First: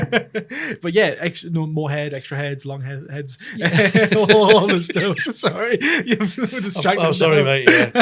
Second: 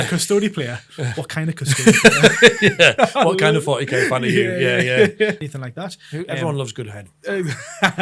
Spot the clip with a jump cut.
second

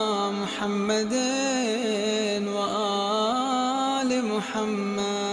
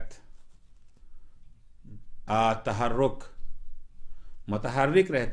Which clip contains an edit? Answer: second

